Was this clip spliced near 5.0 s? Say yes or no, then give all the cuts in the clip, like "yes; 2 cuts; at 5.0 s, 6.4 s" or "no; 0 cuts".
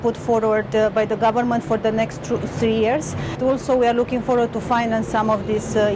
no; 1 cut; at 3.4 s